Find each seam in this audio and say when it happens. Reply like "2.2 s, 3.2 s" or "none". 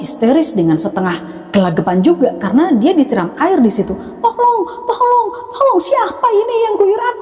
none